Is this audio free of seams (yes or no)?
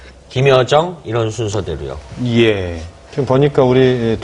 yes